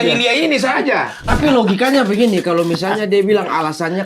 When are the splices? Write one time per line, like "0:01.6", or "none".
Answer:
0:01.2